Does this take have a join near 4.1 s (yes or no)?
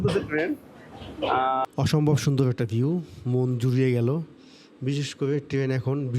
no